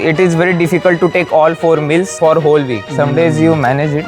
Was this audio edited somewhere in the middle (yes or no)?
no